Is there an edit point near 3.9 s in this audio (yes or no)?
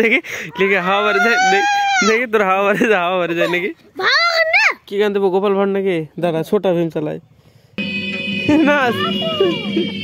yes